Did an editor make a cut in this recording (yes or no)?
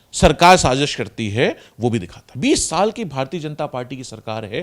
yes